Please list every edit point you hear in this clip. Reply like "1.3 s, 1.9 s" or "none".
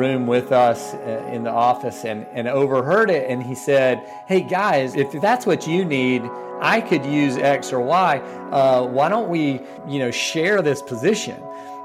4.9 s, 9.7 s